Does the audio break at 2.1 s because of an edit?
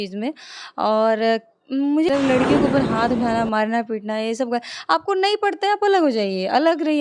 yes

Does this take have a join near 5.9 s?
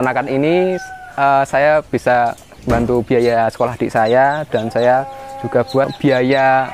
yes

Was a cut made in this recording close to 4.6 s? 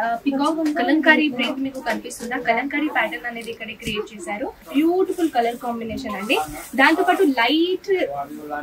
yes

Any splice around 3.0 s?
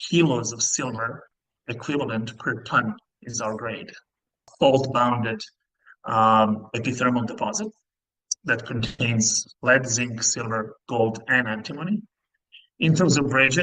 no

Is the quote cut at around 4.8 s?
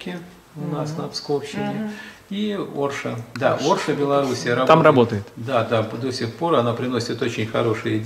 no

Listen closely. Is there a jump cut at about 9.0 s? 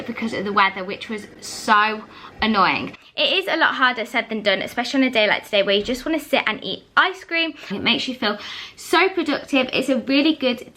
no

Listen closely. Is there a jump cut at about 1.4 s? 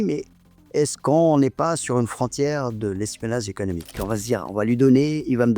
no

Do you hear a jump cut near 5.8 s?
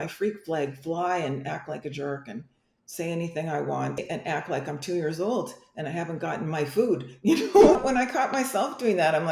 no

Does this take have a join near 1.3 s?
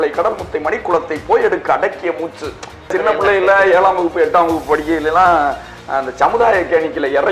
no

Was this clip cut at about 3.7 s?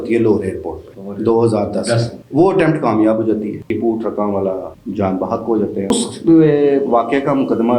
yes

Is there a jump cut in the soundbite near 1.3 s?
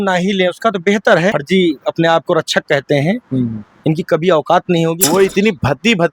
yes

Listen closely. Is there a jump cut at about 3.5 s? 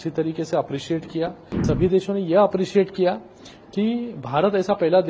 no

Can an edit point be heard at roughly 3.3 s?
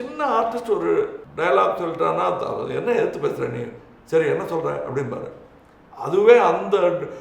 no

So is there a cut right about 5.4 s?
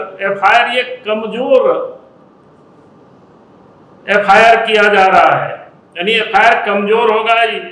no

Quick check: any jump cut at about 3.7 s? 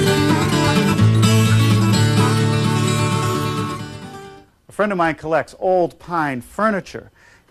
no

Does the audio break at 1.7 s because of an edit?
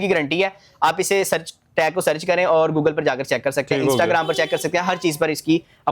no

